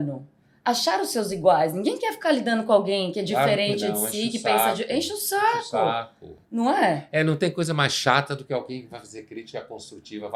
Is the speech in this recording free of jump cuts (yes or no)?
yes